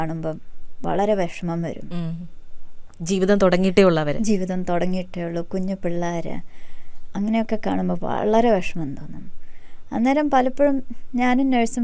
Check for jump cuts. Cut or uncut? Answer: uncut